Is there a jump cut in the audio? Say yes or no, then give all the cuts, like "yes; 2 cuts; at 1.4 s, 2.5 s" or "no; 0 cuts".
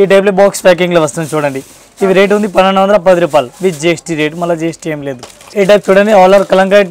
no; 0 cuts